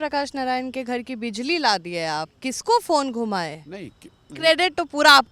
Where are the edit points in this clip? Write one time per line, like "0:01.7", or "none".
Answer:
0:04.3